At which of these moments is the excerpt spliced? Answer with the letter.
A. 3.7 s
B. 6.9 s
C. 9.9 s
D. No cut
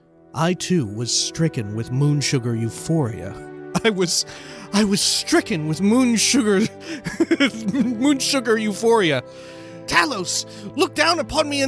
C